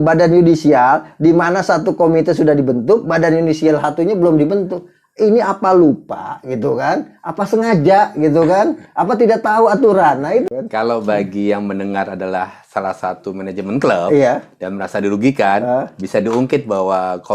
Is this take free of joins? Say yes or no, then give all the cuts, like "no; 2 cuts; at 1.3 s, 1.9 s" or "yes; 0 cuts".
no; 1 cut; at 10.5 s